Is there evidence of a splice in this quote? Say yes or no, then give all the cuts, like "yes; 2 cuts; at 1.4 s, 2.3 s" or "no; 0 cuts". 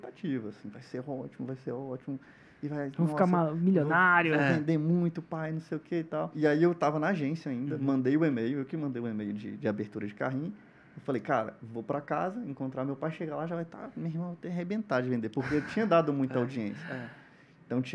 yes; 1 cut; at 6.3 s